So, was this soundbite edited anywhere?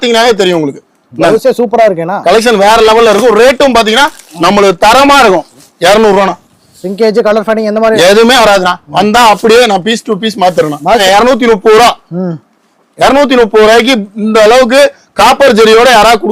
yes; 2 cuts; at 5.7 s, 11.0 s

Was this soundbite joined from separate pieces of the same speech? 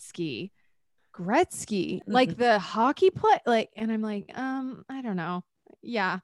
yes; 1 cut; at 2.0 s

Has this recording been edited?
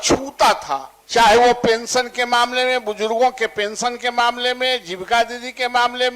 yes; 1 cut; at 0.9 s

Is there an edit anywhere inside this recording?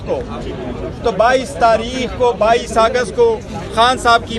no; 0 cuts

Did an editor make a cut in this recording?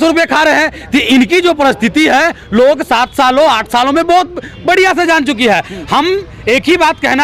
no; 0 cuts

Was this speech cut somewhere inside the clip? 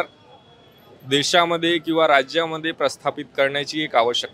no; 0 cuts

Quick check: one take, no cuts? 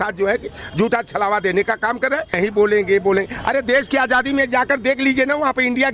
no; 1 cut; at 2.3 s

